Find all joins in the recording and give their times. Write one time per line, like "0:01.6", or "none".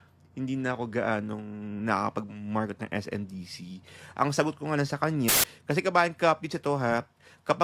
0:05.3